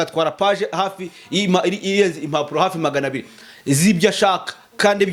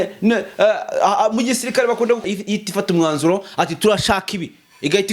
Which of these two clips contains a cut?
second; 1 cut; at 2.2 s

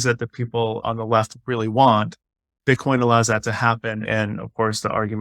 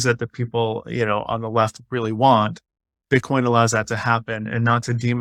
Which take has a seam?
first; 2 cuts; at 0.8 s, 4.0 s

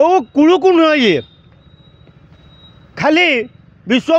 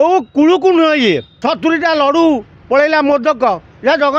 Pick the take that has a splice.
second; 1 cut; at 1.3 s

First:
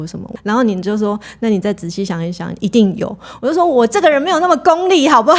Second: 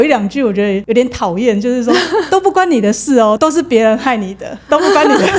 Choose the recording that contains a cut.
second; 2 cuts; at 0.8 s, 3.4 s

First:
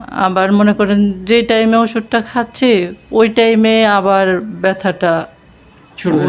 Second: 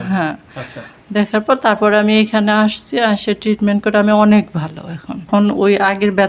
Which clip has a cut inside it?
second; 1 cut; at 5.3 s

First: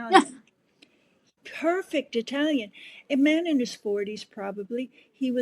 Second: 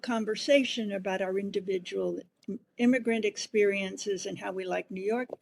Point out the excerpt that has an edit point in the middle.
first; 2 cuts; at 1.3 s, 3.1 s

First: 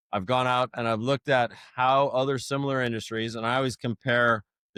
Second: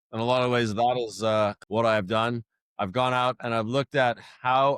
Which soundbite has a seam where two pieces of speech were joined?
second; 1 cut; at 1.6 s

